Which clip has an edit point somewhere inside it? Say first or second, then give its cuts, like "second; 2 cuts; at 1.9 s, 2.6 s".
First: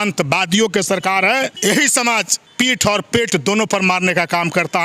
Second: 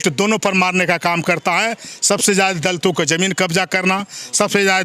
first; 2 cuts; at 1.6 s, 2.4 s